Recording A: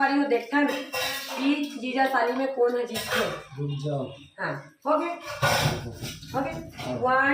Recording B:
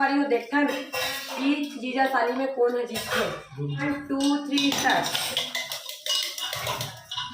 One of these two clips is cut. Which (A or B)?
B